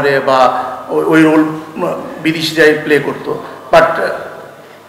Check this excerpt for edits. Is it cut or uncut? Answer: uncut